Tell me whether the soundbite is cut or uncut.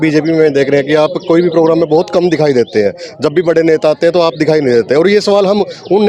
uncut